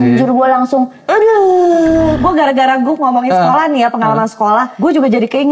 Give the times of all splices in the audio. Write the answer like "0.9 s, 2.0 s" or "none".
1.0 s, 2.2 s, 4.7 s